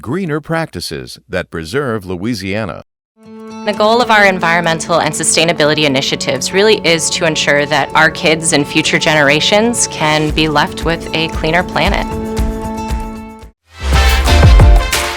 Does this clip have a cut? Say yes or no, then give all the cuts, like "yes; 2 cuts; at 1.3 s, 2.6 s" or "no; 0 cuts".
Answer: no; 0 cuts